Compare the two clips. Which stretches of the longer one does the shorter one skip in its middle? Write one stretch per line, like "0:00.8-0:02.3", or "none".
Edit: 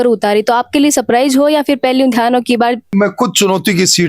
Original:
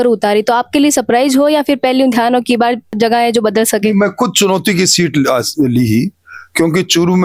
0:02.9-0:03.9

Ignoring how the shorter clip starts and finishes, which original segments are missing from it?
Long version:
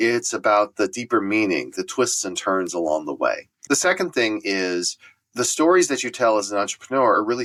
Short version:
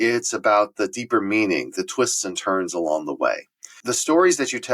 0:03.5-0:05.0

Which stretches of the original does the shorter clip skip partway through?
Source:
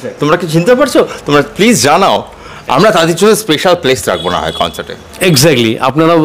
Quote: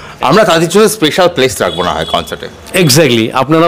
none

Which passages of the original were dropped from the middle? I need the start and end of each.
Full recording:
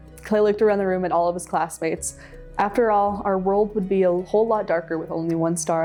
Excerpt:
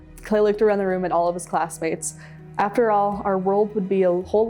none

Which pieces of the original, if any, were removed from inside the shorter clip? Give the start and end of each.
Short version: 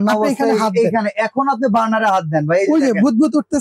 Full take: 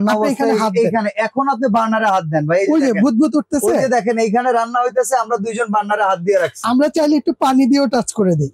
none

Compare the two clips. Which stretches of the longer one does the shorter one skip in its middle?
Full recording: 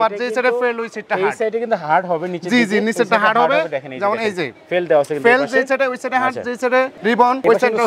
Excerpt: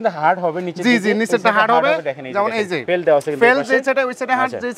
0:04.4-0:04.6

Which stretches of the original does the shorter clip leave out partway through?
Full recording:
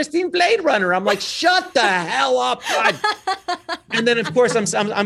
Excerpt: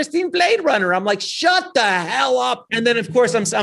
0:02.6-0:03.8

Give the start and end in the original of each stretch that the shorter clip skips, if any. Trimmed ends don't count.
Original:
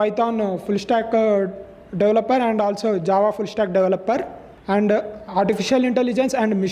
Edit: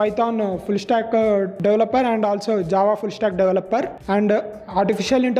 0:01.5-0:01.9
0:04.3-0:04.6

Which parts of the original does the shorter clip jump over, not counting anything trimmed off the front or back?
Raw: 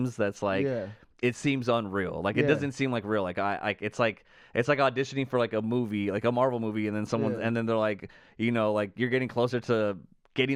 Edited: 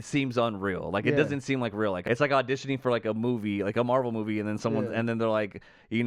0:03.3-0:04.5

